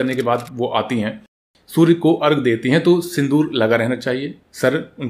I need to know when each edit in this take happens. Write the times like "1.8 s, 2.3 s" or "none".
none